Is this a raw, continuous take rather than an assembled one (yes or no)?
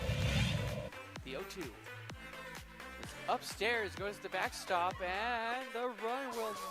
no